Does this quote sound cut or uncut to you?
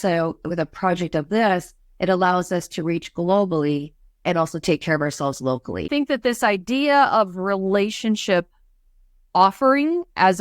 cut